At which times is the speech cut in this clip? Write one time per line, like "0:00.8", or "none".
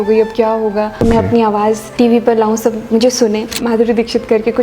0:01.0
0:01.9
0:03.6